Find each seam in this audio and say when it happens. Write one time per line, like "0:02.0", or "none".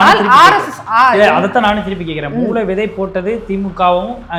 none